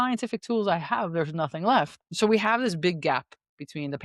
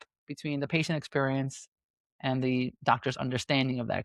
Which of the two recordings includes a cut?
first; 1 cut; at 2.0 s

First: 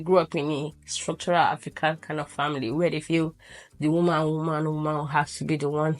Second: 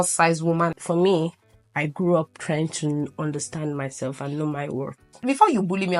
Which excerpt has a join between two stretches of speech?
second; 2 cuts; at 0.8 s, 5.1 s

